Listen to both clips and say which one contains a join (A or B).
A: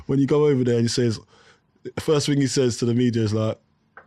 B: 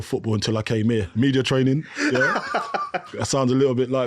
B